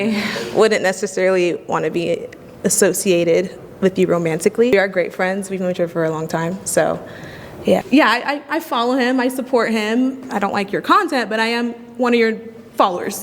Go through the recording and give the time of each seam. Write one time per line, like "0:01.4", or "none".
0:04.7
0:07.8